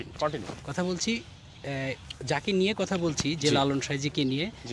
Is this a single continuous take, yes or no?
yes